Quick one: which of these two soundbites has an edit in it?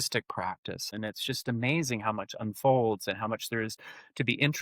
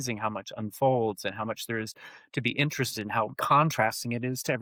first; 1 cut; at 0.9 s

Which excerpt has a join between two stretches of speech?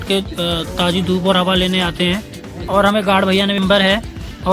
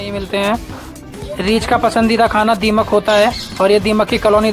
first; 1 cut; at 3.6 s

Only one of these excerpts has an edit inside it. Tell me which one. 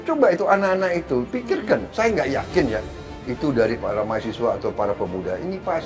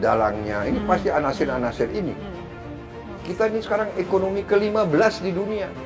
second; 1 cut; at 2.7 s

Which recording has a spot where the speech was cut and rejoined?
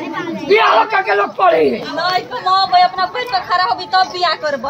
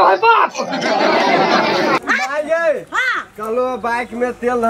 second; 1 cut; at 2.0 s

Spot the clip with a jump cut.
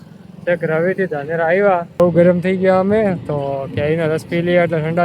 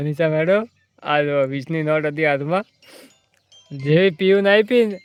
first; 1 cut; at 2.0 s

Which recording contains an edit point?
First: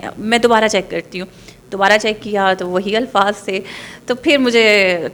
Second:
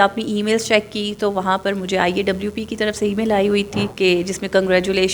second; 1 cut; at 3.9 s

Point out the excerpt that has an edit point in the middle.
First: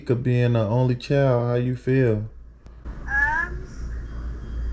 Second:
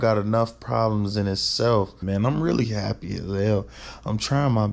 second; 1 cut; at 2.0 s

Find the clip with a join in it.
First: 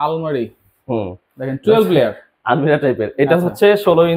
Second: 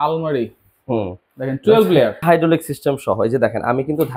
second; 1 cut; at 2.2 s

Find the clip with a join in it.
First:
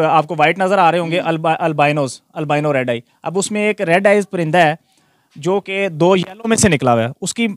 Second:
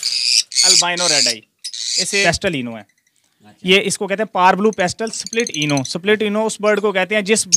second; 1 cut; at 2.2 s

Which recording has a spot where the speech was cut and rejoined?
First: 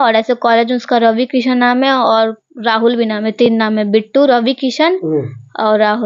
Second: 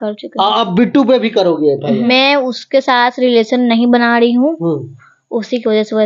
second; 1 cut; at 2.0 s

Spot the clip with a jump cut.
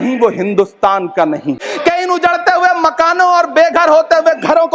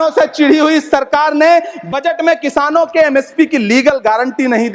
first; 1 cut; at 1.7 s

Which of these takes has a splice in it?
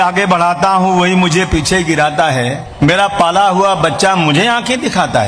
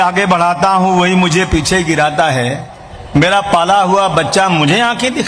first; 1 cut; at 2.6 s

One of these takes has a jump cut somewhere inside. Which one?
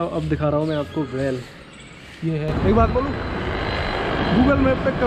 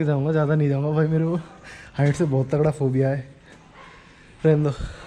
first; 1 cut; at 2.5 s

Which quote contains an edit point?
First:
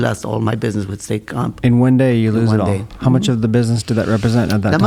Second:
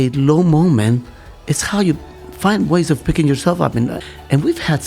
second; 1 cut; at 4.0 s

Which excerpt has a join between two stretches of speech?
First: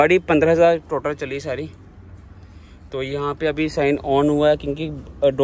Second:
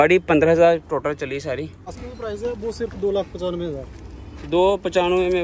second; 1 cut; at 2.0 s

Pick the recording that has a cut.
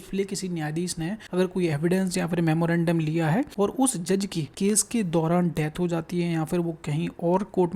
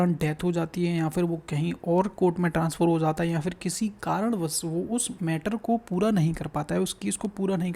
first; 3 cuts; at 1.2 s, 3.5 s, 4.4 s

